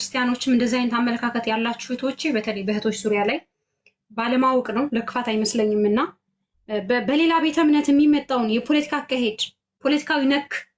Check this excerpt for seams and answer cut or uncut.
uncut